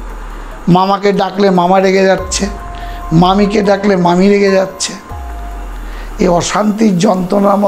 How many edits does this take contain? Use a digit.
0